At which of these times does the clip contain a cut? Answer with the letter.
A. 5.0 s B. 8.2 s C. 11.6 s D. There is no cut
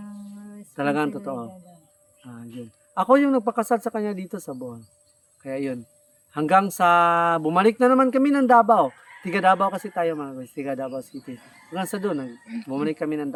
D